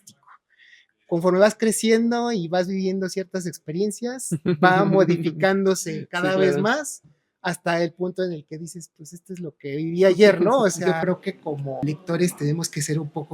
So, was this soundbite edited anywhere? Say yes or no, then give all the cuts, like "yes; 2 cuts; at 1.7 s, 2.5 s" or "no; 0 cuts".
yes; 2 cuts; at 10.8 s, 11.8 s